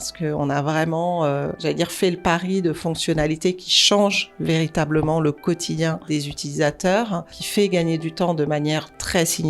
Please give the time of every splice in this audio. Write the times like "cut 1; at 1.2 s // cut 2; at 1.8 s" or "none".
cut 1; at 1.5 s // cut 2; at 6.0 s // cut 3; at 7.4 s